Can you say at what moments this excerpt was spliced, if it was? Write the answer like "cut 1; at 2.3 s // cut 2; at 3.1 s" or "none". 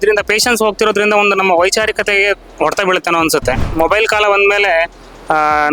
cut 1; at 3.7 s